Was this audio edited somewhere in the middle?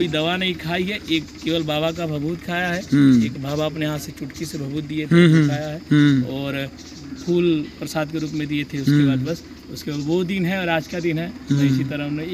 no; 0 cuts

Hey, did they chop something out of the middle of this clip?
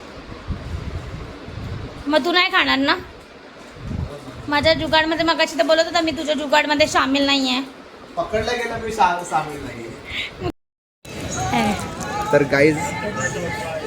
yes; 1 cut; at 10.5 s

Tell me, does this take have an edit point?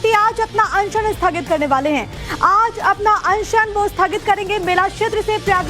no; 0 cuts

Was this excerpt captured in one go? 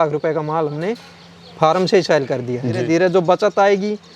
no; 1 cut; at 2.8 s

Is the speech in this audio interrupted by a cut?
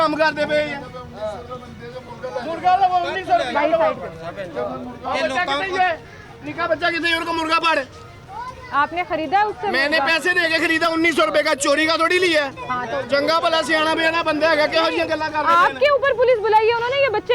no; 0 cuts

